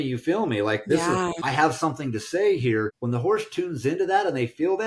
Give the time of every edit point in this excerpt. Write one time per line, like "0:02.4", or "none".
0:01.4
0:03.0